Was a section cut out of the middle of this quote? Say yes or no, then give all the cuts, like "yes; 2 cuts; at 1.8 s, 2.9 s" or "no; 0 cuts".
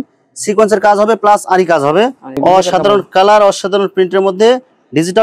yes; 1 cut; at 2.4 s